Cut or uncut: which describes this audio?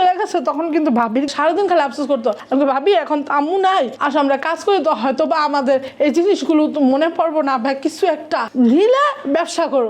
cut